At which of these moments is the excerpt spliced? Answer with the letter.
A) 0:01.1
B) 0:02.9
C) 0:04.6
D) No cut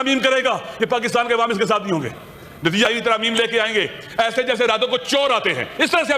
B